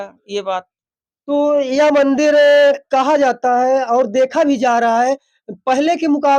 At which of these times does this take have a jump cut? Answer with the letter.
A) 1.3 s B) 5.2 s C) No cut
C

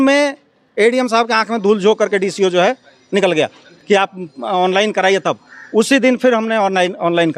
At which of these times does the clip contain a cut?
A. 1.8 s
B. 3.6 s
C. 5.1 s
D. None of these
D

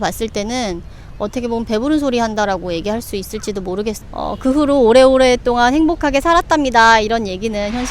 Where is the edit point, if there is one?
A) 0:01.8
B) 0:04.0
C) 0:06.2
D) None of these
B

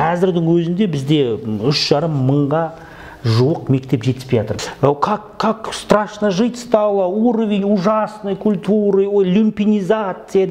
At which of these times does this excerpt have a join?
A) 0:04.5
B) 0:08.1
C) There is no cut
A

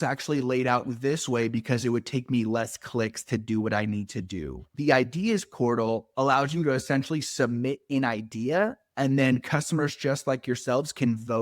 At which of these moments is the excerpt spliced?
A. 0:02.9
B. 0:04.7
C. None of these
B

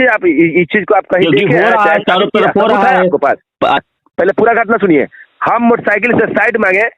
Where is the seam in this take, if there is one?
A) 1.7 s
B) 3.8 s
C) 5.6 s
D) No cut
B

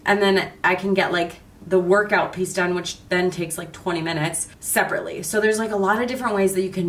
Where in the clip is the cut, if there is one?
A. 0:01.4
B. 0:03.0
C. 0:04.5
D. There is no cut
D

